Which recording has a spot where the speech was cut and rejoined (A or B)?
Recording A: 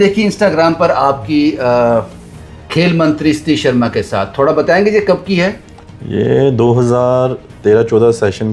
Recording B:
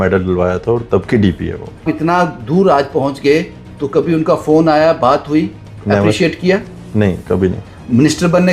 B